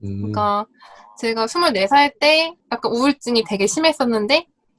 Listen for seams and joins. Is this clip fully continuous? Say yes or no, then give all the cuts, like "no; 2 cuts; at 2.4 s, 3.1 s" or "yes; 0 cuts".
no; 1 cut; at 2.6 s